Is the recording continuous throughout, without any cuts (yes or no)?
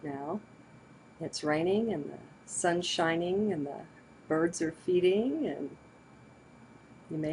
no